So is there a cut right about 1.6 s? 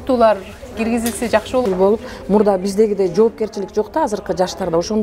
yes; 1 cut; at 1.6 s

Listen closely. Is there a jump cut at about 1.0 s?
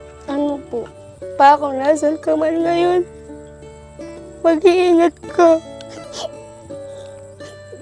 yes; 1 cut; at 1.0 s

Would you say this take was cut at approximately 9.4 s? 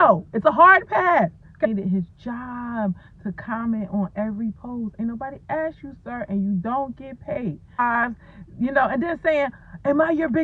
no; 2 cuts; at 1.7 s, 7.8 s

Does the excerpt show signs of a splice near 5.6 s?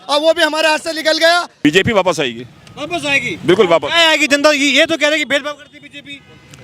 no; 1 cut; at 1.5 s

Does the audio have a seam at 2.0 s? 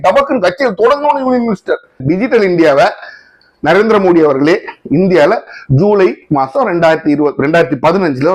yes; 1 cut; at 2.0 s

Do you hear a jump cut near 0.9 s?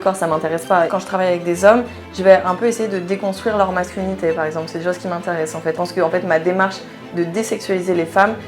yes; 2 cuts; at 0.9 s, 5.7 s

